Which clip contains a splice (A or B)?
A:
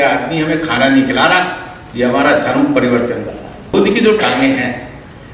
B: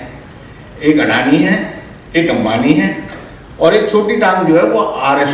A